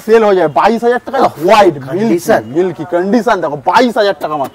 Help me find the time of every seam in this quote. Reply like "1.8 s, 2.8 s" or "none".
none